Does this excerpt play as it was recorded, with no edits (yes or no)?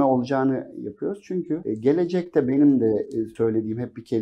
no